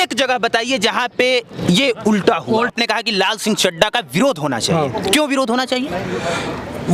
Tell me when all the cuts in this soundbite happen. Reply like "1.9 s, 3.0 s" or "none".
2.7 s